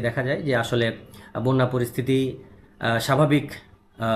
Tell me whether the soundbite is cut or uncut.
uncut